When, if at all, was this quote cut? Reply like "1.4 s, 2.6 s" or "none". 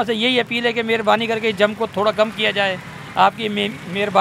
none